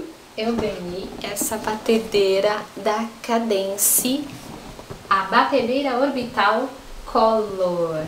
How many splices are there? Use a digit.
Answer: 1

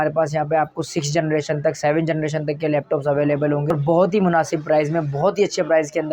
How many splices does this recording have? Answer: 1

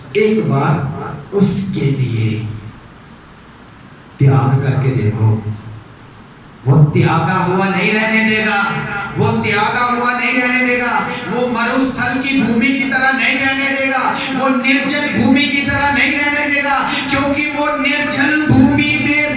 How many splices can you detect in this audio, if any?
0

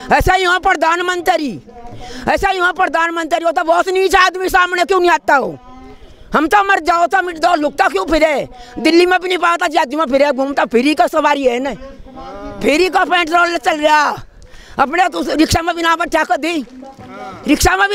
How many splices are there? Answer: 0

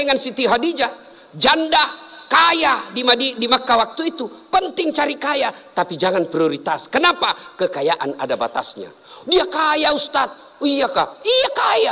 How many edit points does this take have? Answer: 0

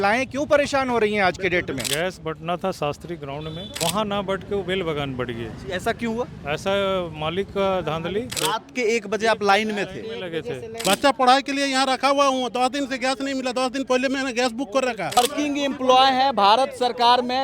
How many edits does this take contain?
5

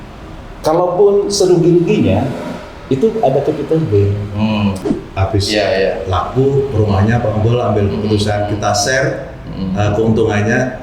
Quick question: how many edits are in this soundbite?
1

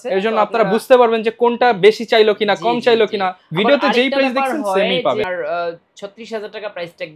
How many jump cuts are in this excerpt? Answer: 1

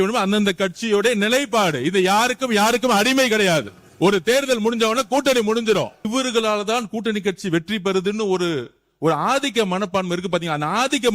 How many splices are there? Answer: 1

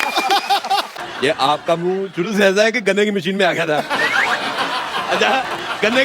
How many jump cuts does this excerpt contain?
1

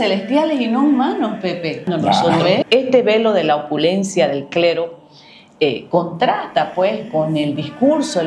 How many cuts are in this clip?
1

